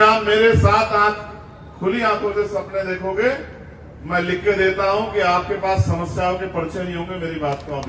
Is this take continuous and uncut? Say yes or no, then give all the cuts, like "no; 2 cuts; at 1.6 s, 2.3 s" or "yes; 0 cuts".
yes; 0 cuts